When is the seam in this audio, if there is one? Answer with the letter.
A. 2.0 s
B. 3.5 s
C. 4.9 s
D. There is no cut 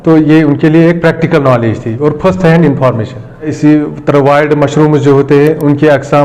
B